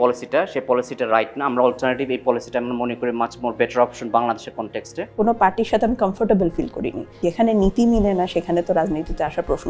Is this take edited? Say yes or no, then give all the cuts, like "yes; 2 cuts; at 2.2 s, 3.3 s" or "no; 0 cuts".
yes; 2 cuts; at 5.2 s, 7.2 s